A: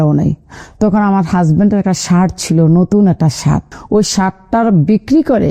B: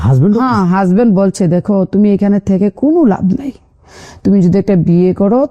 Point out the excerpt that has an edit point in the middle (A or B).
A